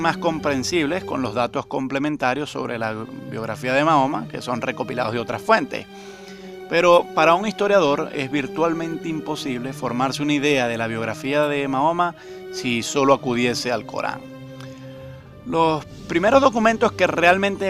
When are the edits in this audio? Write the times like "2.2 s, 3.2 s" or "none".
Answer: none